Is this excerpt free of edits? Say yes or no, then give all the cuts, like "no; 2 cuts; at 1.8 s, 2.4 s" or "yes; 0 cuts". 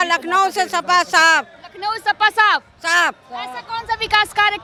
yes; 0 cuts